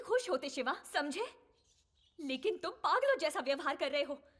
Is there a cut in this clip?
no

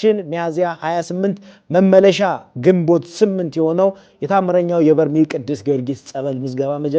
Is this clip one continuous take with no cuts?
yes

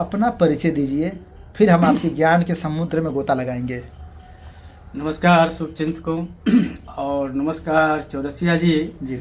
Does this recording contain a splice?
no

